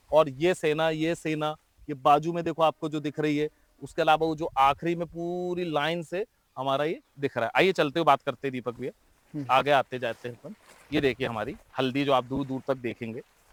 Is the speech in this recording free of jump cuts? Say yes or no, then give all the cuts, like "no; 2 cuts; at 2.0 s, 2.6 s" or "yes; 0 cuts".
yes; 0 cuts